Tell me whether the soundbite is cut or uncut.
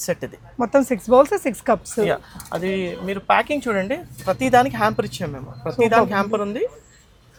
uncut